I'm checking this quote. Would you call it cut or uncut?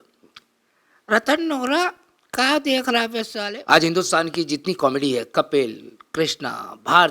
cut